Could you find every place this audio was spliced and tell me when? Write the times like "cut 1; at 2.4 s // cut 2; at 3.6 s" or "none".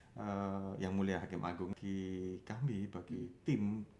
cut 1; at 1.8 s